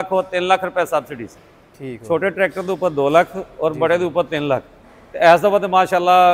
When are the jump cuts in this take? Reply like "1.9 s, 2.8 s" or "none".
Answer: none